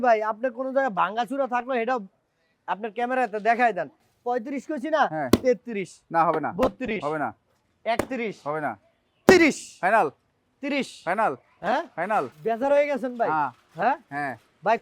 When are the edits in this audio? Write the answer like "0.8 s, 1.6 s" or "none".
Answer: 4.1 s, 12.3 s